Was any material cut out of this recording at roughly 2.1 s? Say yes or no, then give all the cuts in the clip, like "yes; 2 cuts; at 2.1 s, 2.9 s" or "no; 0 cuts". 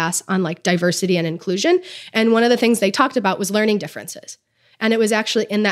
no; 0 cuts